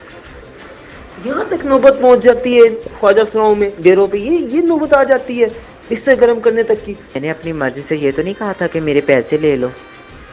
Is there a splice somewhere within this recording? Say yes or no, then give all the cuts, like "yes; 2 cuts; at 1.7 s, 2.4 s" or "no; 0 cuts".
yes; 1 cut; at 7.1 s